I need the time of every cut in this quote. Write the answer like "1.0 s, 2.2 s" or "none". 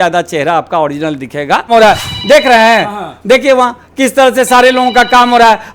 1.7 s